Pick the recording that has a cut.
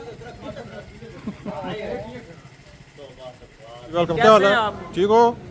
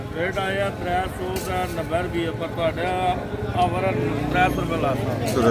first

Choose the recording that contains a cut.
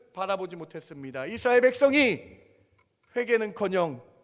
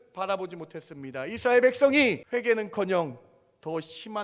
second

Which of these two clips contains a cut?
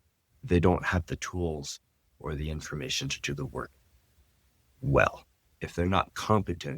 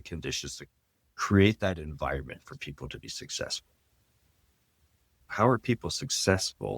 second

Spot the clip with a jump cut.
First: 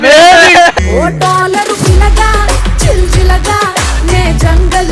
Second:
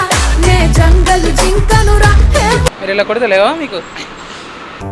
second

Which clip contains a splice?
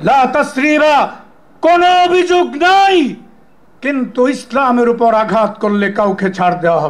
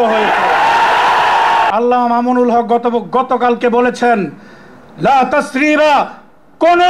second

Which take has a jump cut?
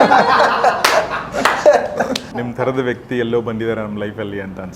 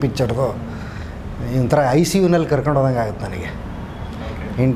first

